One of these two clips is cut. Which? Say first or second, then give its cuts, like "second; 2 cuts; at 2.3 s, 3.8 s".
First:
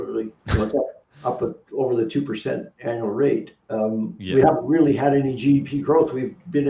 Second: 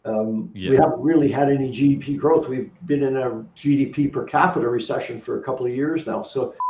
first; 1 cut; at 2.7 s